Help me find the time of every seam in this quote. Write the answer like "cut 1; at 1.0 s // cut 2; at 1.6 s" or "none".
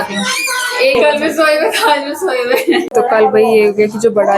cut 1; at 0.9 s // cut 2; at 2.9 s

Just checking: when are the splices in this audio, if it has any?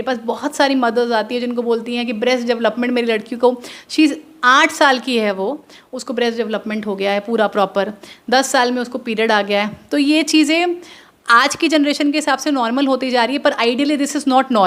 none

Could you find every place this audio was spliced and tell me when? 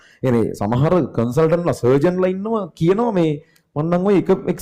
none

